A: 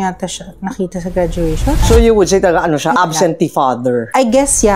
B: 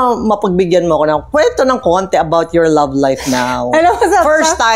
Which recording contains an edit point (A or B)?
A